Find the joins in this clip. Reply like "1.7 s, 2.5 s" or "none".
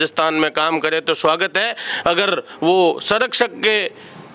none

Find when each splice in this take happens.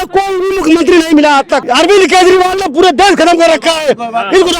1.6 s

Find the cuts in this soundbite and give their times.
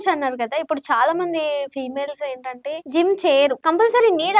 2.8 s, 3.6 s

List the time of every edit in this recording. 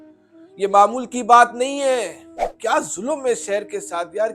2.5 s

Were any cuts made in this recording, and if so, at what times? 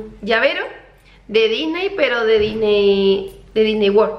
none

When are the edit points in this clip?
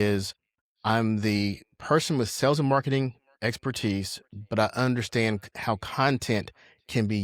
none

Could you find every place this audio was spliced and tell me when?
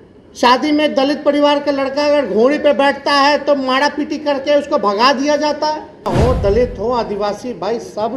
6.1 s

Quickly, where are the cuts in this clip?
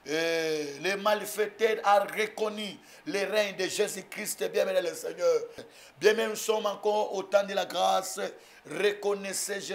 5.6 s

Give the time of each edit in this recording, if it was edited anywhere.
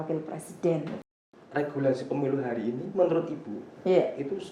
1.0 s

